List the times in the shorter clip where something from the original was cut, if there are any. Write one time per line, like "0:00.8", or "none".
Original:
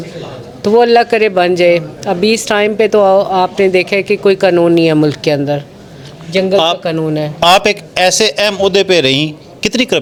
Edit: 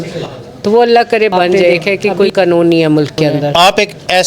0:01.9
0:03.5